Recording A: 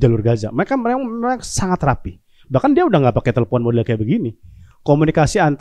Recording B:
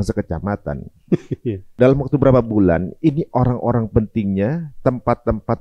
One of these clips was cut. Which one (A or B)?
B